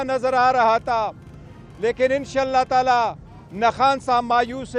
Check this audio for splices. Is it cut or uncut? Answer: uncut